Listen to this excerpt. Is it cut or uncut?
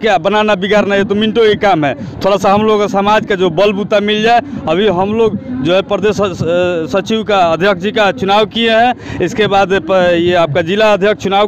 uncut